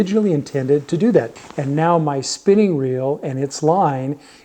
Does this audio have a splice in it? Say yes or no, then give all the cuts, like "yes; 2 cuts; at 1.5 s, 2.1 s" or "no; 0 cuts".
yes; 1 cut; at 1.3 s